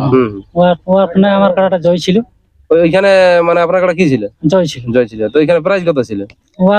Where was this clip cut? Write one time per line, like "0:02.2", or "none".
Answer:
none